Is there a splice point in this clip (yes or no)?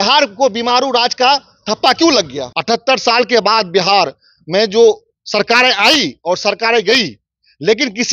yes